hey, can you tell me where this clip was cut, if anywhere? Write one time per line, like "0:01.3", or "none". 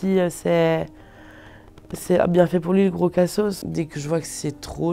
0:03.6

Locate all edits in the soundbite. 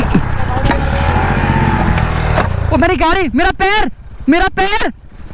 none

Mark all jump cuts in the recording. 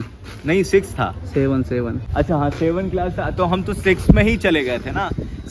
0:02.0

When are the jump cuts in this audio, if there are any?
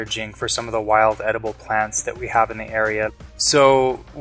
0:03.1

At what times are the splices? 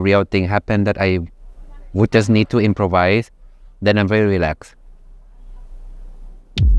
none

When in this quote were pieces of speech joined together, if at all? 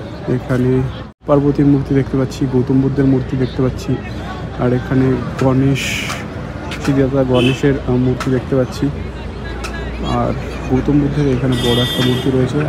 0:01.2

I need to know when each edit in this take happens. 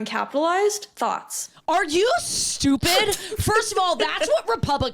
0:01.6

